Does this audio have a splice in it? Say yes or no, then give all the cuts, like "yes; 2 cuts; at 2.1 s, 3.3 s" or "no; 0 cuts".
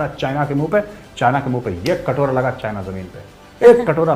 no; 0 cuts